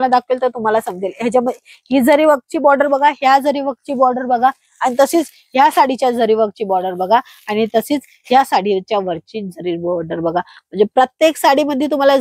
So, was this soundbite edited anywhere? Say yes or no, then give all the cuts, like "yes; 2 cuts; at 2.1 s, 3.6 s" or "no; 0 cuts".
no; 0 cuts